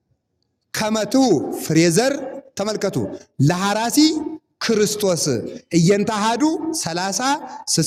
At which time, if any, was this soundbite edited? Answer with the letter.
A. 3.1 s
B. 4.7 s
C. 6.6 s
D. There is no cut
D